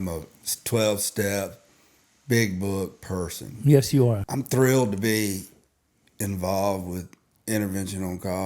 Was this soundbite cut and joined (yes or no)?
yes